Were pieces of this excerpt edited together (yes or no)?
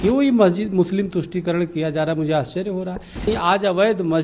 yes